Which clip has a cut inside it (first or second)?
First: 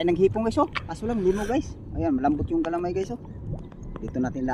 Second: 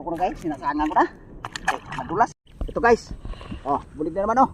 second